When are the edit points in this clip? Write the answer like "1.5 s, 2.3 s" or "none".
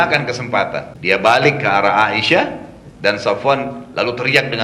0.9 s